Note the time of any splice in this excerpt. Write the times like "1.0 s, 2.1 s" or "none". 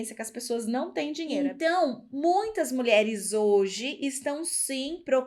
1.3 s